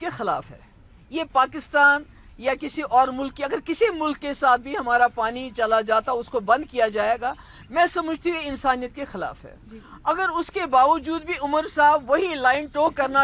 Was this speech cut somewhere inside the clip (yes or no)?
no